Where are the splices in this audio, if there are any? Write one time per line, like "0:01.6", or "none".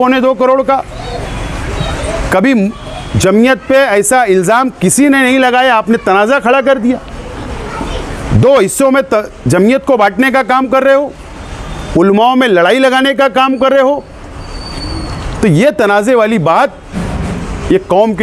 none